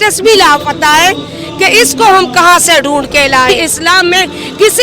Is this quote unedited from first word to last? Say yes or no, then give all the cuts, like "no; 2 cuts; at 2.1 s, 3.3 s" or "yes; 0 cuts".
no; 1 cut; at 3.5 s